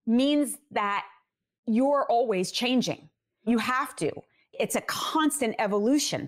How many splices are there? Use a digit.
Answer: 2